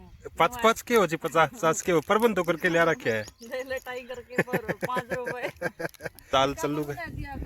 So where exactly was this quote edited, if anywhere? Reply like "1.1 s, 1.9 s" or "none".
6.1 s